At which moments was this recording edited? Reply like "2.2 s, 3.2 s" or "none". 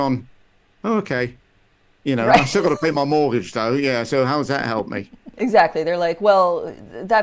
5.2 s